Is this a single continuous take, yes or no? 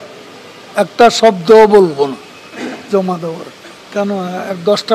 no